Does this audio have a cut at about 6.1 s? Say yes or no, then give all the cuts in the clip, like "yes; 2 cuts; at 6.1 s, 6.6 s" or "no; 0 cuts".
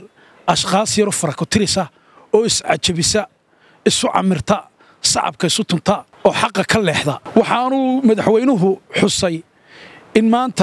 yes; 2 cuts; at 6.1 s, 7.2 s